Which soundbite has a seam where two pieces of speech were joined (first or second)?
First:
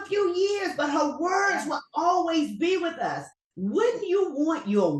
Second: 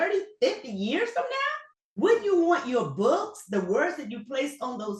second